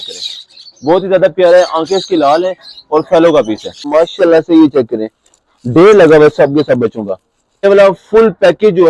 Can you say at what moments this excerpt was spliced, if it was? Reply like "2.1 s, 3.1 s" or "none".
3.8 s, 7.6 s